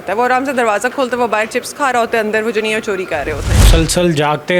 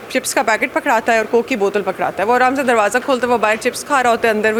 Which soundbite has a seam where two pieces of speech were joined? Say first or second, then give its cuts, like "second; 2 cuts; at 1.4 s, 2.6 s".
first; 1 cut; at 3.7 s